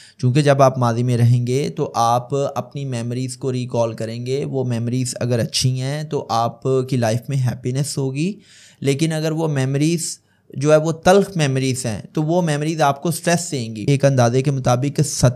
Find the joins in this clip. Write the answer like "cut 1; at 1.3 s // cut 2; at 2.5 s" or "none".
cut 1; at 13.8 s